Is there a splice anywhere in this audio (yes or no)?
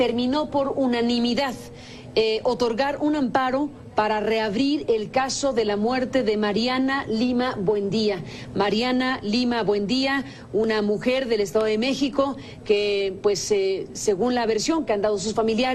yes